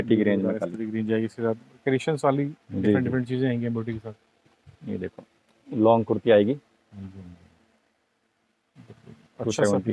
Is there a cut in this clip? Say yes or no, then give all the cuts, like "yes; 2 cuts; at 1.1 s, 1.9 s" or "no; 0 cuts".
no; 0 cuts